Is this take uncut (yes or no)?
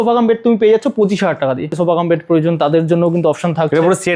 no